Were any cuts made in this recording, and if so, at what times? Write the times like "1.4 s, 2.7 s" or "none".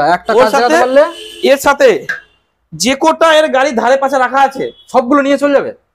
none